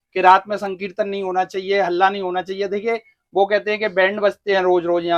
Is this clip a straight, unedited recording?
yes; 0 cuts

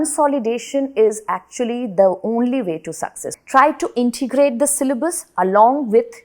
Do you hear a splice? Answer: yes; 1 cut; at 3.2 s

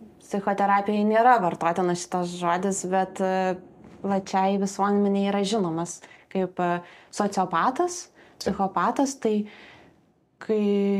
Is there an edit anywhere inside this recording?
no; 0 cuts

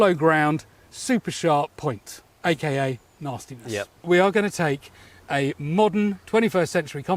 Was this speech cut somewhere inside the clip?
yes; 2 cuts; at 1.7 s, 4.0 s

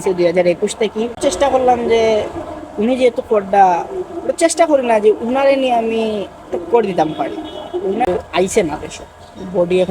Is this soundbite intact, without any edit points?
no; 2 cuts; at 1.1 s, 8.1 s

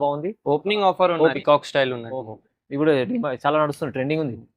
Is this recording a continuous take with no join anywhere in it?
no; 1 cut; at 1.4 s

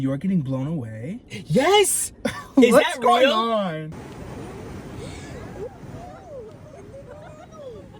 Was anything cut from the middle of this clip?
yes; 1 cut; at 3.9 s

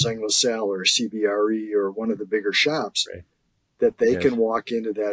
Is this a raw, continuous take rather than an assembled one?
yes; 0 cuts

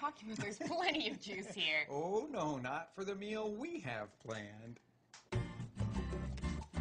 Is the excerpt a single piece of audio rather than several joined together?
no; 1 cut; at 2.9 s

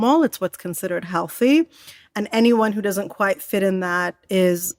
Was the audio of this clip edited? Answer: no; 0 cuts

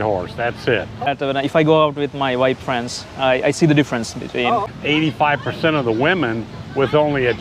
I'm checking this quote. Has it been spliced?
yes; 2 cuts; at 1.1 s, 4.7 s

